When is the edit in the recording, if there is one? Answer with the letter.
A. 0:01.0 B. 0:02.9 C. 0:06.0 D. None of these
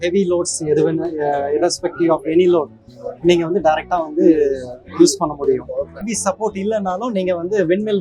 C